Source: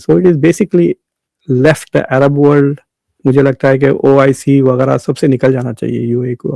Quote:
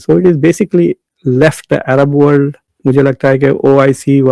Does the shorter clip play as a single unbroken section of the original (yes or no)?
no